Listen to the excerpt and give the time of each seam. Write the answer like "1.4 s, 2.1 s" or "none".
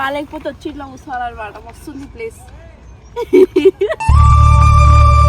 none